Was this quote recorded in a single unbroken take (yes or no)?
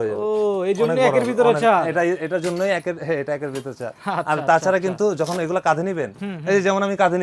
yes